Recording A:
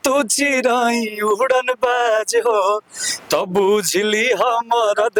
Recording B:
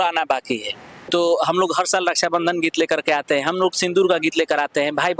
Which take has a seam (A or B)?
B